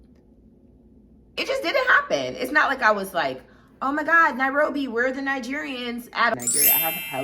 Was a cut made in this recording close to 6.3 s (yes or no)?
yes